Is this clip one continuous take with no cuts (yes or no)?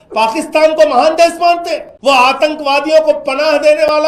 no